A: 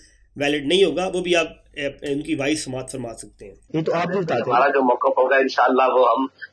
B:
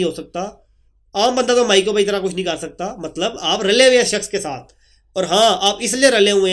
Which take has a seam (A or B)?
A